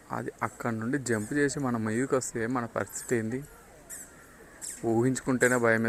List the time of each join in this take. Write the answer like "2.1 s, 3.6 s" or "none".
none